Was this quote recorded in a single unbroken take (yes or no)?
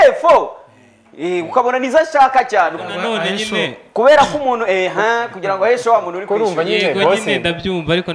yes